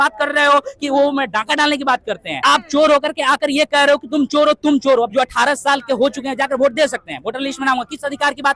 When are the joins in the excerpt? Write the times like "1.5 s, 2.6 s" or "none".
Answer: 2.4 s, 5.1 s